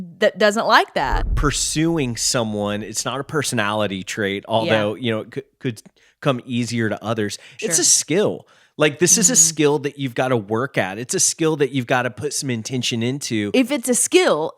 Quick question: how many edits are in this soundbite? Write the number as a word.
two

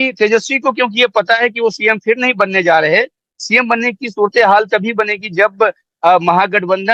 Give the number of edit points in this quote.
zero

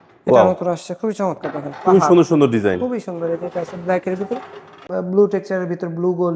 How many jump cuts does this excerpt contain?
one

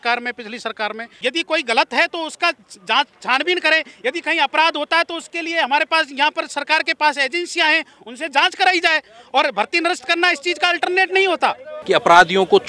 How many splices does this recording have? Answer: two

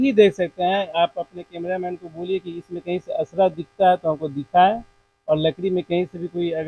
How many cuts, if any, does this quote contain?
zero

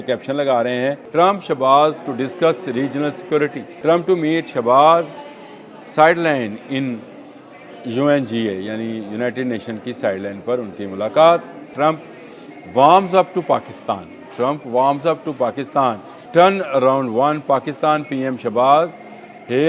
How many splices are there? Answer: four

